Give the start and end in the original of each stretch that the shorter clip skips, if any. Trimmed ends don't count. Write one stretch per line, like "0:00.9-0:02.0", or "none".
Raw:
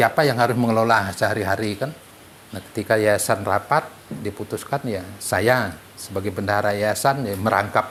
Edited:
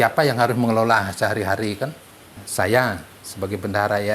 0:02.4-0:05.1